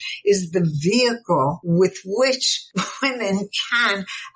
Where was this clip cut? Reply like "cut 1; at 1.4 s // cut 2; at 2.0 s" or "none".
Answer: cut 1; at 1.6 s // cut 2; at 2.6 s